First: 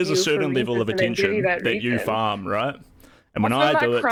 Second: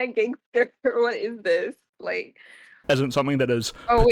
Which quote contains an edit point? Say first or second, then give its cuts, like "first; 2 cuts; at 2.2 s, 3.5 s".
second; 1 cut; at 2.7 s